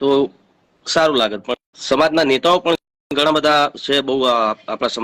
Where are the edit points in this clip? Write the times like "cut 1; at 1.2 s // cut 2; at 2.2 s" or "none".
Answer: cut 1; at 1.7 s